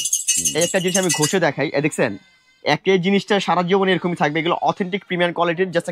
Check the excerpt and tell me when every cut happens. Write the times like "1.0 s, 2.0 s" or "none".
none